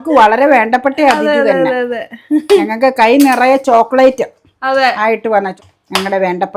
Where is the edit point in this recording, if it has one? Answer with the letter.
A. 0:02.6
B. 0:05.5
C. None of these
B